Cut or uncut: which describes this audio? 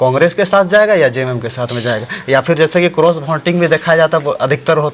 uncut